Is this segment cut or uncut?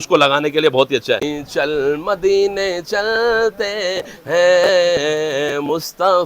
cut